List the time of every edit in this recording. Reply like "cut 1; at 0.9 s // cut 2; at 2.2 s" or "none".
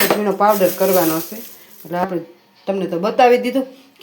cut 1; at 2.0 s